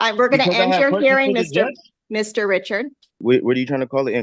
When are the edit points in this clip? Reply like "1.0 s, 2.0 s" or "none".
3.2 s